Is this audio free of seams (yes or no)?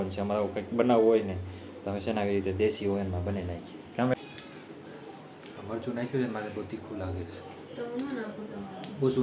no